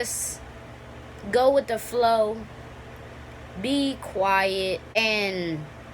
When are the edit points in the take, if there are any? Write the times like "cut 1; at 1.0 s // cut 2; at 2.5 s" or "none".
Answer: cut 1; at 5.0 s